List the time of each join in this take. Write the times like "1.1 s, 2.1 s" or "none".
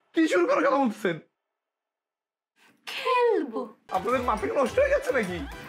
3.7 s